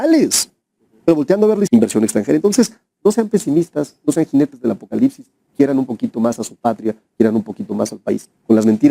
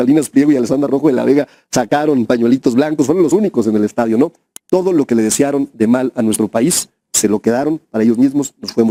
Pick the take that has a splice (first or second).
first